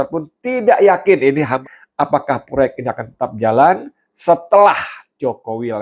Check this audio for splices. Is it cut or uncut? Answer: cut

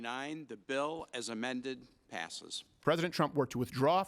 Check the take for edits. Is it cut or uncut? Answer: cut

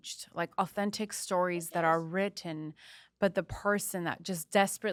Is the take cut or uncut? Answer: uncut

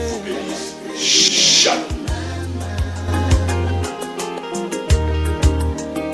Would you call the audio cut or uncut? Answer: uncut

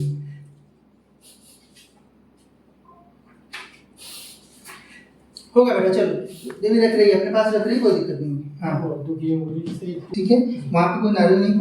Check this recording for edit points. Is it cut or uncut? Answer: cut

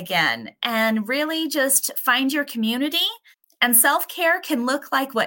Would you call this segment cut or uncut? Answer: uncut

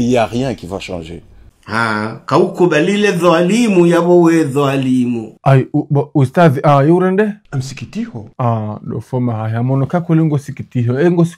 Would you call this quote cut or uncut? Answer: cut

